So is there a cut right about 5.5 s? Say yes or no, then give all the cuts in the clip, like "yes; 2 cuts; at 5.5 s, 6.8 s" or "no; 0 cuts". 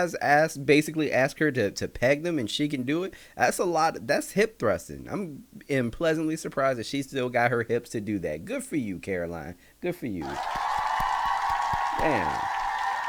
no; 0 cuts